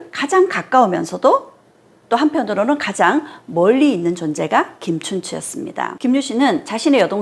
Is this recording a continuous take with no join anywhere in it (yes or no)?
no